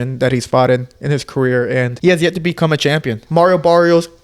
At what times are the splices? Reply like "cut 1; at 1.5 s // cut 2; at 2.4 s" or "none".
cut 1; at 1.9 s // cut 2; at 3.2 s